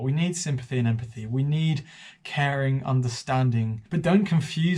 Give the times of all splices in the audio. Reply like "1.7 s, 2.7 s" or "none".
3.8 s